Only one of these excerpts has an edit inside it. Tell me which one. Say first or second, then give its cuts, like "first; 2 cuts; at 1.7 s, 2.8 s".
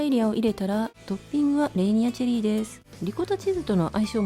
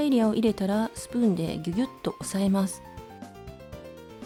first; 2 cuts; at 1.0 s, 2.8 s